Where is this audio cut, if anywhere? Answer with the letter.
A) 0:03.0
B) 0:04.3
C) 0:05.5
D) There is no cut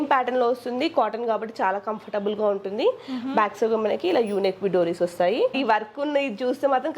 C